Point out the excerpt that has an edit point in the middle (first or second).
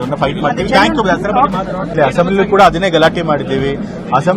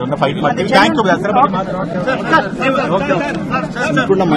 first